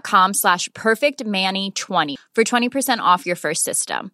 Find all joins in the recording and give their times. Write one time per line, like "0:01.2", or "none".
0:02.1